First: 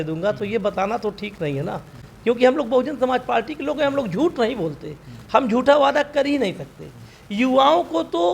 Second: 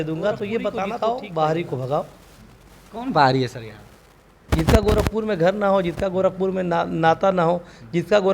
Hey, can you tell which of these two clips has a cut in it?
second; 1 cut; at 0.9 s

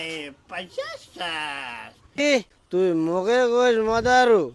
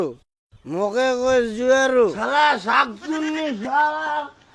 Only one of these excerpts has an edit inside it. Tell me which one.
first; 1 cut; at 2.2 s

